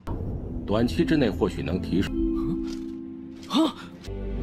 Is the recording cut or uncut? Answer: uncut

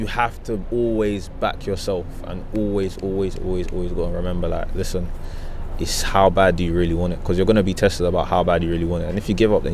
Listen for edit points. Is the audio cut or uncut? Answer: uncut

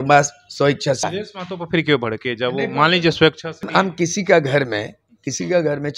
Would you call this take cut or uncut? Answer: cut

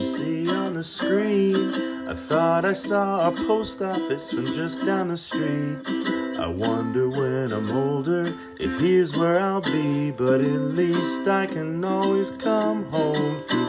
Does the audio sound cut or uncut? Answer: uncut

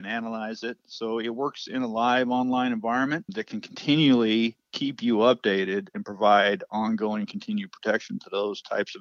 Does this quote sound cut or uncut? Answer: uncut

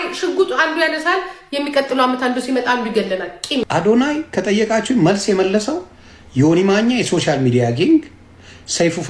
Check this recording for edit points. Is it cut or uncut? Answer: cut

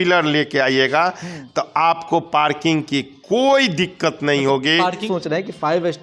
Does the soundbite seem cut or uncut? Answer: cut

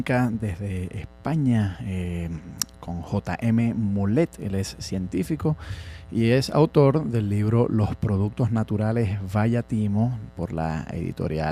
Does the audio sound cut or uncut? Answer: cut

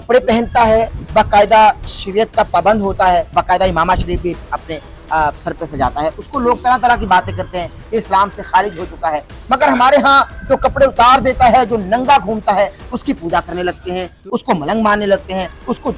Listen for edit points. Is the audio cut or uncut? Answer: cut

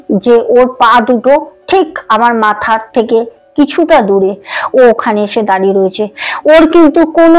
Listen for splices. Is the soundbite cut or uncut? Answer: uncut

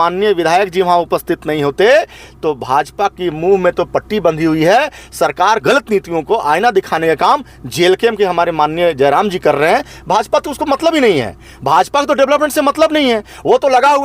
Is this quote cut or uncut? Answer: cut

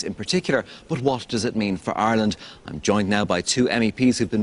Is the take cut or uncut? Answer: cut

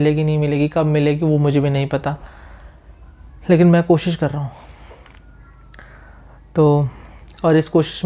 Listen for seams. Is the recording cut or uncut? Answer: uncut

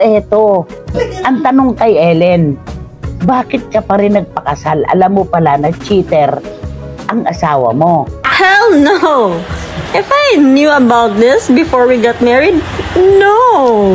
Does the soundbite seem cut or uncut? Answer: cut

